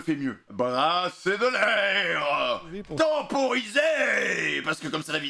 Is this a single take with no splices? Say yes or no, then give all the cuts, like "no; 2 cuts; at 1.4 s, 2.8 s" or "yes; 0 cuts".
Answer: yes; 0 cuts